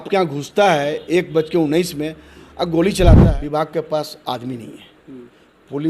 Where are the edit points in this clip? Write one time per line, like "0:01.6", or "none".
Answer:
0:03.3